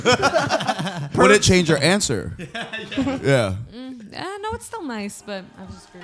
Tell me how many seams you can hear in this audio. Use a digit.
1